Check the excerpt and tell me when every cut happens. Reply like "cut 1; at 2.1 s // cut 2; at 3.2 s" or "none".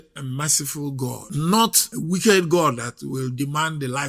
cut 1; at 1.2 s // cut 2; at 1.9 s